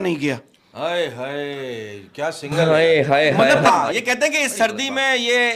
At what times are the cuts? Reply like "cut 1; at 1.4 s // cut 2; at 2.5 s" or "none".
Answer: cut 1; at 3.7 s